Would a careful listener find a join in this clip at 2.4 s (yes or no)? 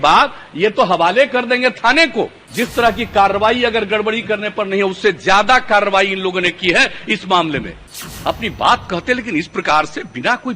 yes